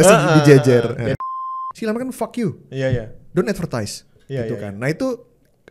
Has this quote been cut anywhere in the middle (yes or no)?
yes